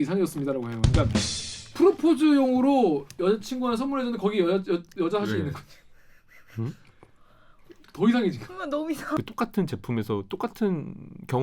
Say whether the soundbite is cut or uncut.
cut